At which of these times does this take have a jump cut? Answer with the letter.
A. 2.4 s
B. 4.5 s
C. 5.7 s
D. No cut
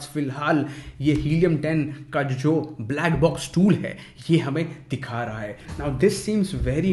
C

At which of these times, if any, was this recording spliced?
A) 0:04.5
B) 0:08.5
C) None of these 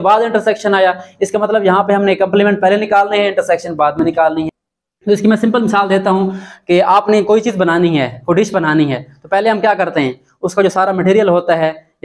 A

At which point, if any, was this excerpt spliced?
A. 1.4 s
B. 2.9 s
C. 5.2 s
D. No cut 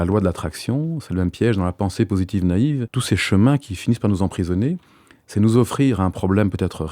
B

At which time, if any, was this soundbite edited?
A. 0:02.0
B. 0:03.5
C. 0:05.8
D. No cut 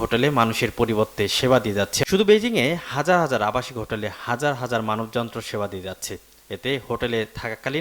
A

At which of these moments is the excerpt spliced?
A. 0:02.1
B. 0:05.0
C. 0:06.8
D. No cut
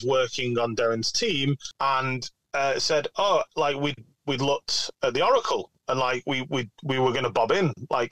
A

